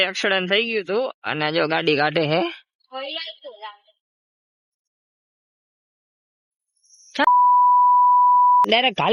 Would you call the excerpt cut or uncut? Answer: uncut